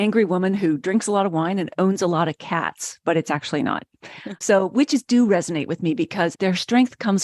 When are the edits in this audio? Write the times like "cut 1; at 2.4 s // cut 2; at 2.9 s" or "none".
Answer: cut 1; at 4.3 s // cut 2; at 6.3 s